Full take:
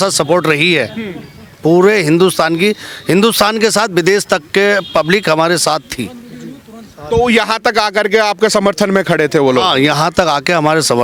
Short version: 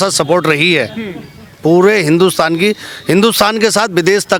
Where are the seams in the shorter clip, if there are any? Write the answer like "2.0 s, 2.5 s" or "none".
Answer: none